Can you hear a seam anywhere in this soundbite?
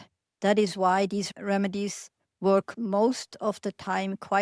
no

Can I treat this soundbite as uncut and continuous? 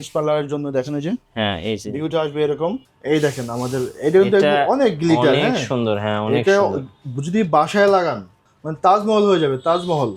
no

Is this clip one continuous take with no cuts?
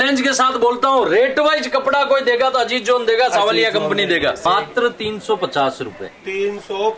no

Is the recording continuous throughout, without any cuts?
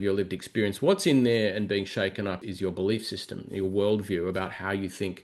no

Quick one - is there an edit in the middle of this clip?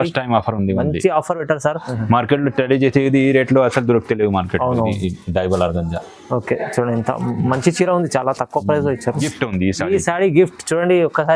yes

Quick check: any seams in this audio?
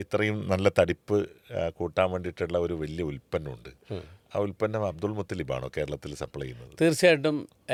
no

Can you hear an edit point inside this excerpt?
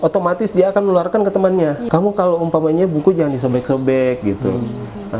yes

